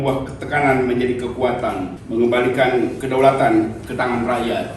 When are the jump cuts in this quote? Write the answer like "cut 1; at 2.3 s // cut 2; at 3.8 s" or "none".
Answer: cut 1; at 2.0 s // cut 2; at 3.0 s